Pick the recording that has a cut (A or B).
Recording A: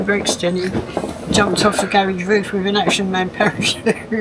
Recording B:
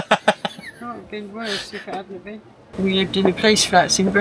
B